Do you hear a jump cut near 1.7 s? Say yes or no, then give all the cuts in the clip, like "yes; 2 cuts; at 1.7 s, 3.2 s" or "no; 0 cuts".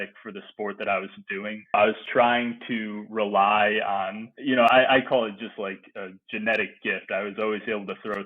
yes; 1 cut; at 1.7 s